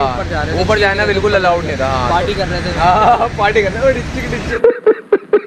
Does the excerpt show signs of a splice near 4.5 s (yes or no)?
yes